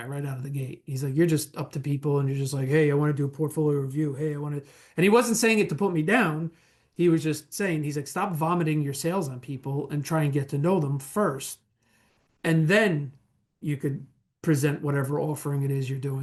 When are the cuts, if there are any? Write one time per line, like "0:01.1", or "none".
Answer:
none